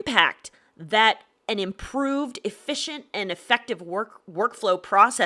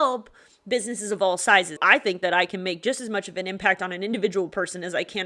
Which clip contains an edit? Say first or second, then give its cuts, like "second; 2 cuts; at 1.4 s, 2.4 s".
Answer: second; 1 cut; at 1.8 s